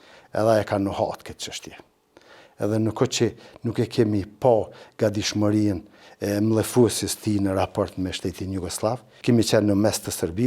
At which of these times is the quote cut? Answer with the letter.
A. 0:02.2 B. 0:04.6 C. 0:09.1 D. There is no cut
C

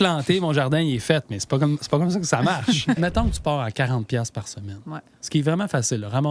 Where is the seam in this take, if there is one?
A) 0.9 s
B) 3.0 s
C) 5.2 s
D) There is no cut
B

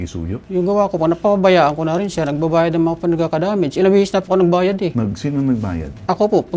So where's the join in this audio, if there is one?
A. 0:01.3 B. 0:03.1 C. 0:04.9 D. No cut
C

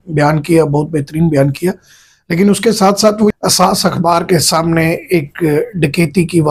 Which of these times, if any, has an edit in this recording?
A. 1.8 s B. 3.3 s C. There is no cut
B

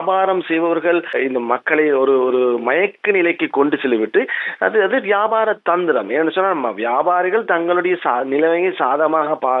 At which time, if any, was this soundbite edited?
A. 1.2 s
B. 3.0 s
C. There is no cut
A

